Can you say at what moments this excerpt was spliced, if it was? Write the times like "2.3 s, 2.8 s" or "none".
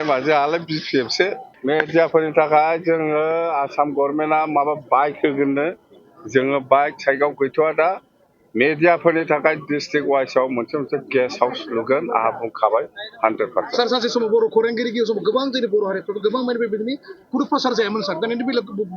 1.5 s